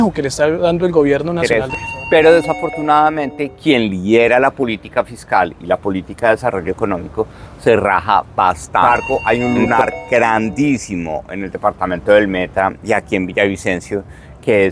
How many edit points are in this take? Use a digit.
2